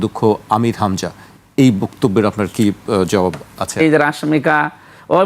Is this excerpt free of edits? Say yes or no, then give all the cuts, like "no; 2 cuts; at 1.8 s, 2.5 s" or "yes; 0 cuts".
no; 1 cut; at 3.8 s